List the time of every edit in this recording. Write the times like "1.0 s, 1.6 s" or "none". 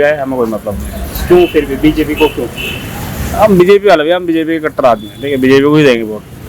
none